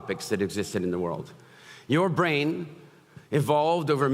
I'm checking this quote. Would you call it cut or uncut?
uncut